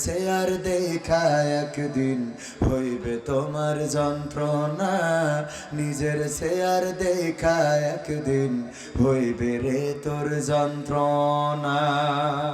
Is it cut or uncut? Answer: uncut